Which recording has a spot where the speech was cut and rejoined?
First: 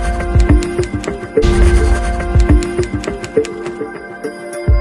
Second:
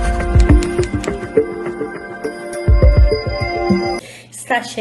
first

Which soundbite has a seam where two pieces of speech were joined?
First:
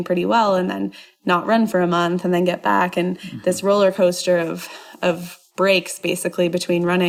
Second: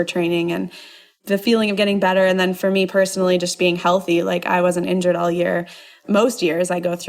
second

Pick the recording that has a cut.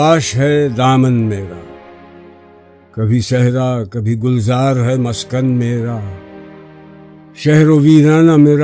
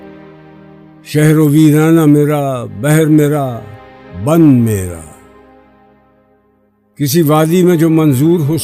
first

